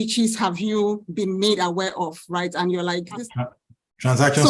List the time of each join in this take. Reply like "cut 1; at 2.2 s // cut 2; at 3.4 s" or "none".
cut 1; at 3.2 s